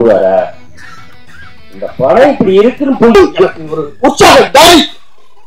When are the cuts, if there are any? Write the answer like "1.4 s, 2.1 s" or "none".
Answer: 3.1 s